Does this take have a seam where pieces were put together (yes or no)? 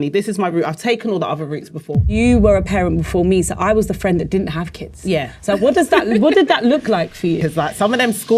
yes